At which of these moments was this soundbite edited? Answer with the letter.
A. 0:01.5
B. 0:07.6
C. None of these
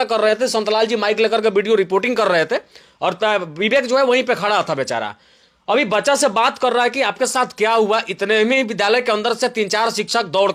C